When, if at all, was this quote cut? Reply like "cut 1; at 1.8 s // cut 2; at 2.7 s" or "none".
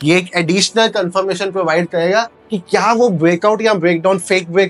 none